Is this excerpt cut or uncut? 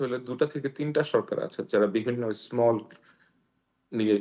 uncut